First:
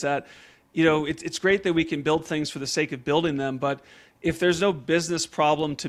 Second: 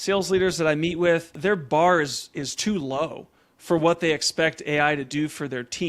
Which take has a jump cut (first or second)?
second